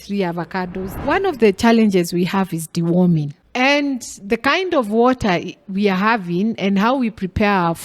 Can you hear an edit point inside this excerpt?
yes; 2 cuts; at 1.1 s, 3.4 s

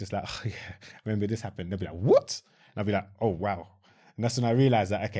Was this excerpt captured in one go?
yes; 0 cuts

